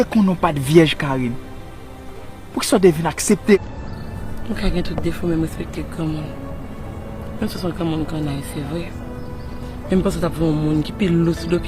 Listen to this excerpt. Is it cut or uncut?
cut